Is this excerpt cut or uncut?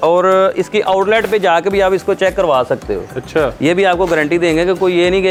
uncut